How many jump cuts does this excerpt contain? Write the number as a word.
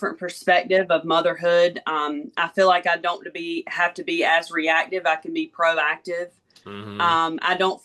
zero